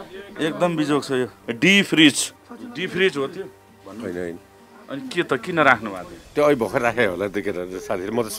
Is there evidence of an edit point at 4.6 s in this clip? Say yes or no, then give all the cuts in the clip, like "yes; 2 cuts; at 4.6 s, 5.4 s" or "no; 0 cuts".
no; 2 cuts; at 1.4 s, 2.3 s